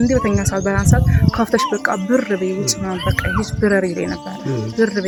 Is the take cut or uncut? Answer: uncut